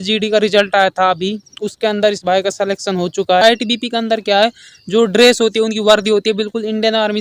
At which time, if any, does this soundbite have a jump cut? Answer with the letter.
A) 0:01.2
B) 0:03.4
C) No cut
B